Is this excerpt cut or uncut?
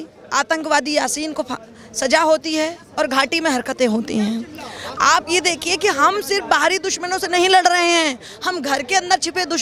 uncut